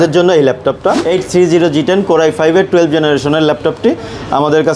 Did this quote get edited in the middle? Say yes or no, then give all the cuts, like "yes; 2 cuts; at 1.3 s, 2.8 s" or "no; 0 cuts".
yes; 1 cut; at 1.0 s